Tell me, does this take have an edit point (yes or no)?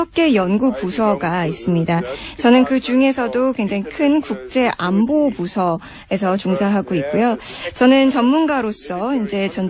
yes